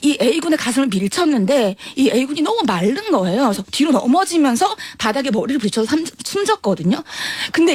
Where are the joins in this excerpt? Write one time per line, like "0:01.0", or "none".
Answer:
none